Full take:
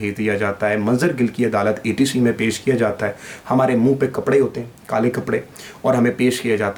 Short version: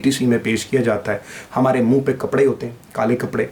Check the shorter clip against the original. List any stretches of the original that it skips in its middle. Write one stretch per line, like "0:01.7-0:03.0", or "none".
none